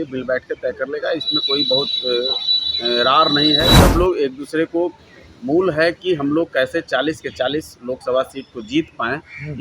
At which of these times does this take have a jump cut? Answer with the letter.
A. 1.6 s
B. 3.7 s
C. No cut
B